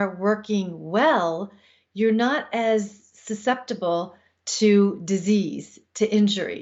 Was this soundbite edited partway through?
no; 0 cuts

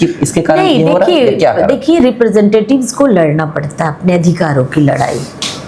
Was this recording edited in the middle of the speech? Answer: no; 0 cuts

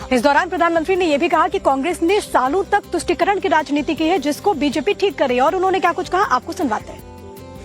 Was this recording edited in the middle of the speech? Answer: yes; 1 cut; at 5.3 s

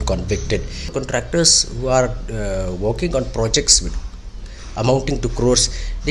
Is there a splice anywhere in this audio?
yes; 1 cut; at 0.9 s

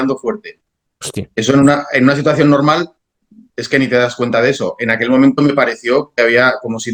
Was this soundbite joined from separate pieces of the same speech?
no; 0 cuts

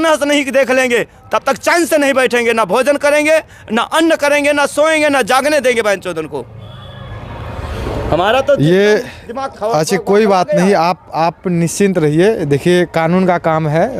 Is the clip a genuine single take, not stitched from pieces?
yes; 0 cuts

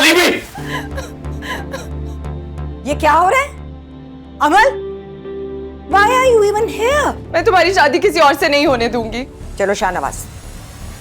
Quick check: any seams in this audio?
yes; 2 cuts; at 7.2 s, 9.4 s

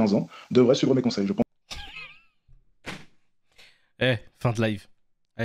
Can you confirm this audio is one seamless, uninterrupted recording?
yes; 0 cuts

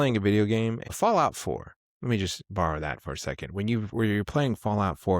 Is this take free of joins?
no; 1 cut; at 0.9 s

